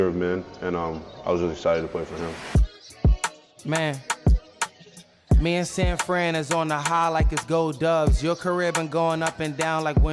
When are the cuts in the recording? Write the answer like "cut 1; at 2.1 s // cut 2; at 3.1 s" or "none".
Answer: cut 1; at 2.6 s